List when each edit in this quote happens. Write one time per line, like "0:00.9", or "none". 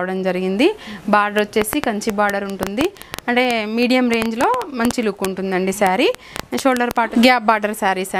0:07.1